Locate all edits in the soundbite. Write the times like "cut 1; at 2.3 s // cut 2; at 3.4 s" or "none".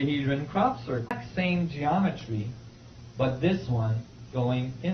none